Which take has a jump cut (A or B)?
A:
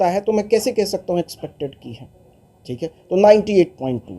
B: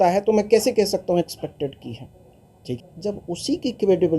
B